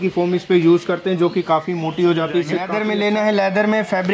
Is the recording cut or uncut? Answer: cut